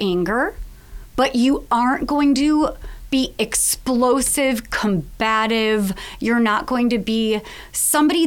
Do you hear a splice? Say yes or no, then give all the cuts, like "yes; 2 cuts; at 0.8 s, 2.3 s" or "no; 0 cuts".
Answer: no; 0 cuts